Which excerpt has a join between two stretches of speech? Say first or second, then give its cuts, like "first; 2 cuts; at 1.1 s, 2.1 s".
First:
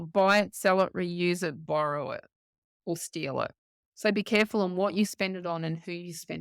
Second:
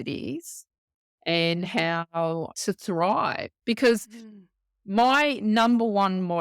second; 2 cuts; at 2.5 s, 3.5 s